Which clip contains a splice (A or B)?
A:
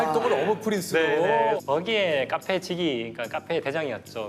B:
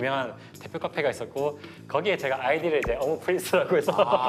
A